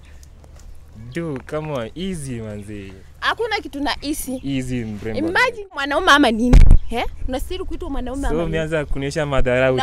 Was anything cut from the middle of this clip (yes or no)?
yes